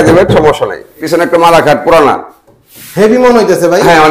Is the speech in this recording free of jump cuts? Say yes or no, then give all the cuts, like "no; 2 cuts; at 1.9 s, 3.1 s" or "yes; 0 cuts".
no; 1 cut; at 1.0 s